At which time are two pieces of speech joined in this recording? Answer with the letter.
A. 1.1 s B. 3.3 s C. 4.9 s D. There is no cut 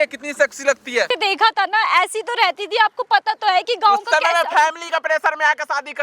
A